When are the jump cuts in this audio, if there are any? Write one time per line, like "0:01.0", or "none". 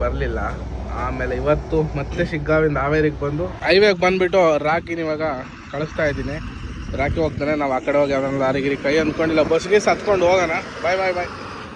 0:03.5